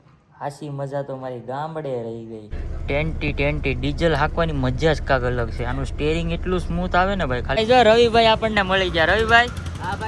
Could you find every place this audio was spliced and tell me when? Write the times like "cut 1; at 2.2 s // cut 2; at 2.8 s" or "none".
cut 1; at 2.4 s // cut 2; at 7.5 s